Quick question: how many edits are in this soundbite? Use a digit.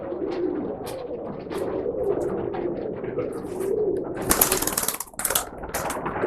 0